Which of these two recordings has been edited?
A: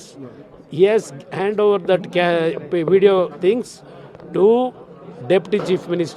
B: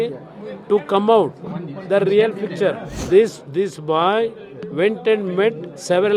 B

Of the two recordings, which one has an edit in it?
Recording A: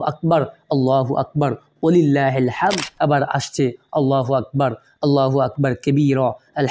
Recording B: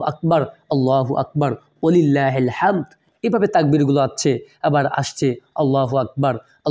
A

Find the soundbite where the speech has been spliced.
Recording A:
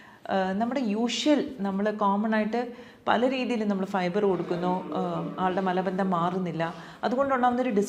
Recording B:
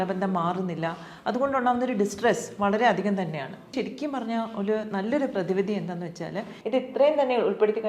B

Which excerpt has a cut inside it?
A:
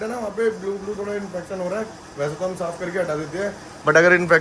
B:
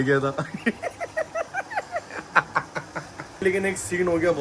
B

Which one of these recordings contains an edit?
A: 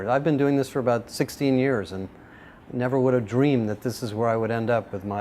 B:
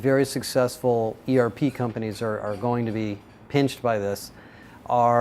A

